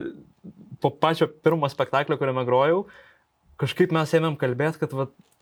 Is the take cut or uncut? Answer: uncut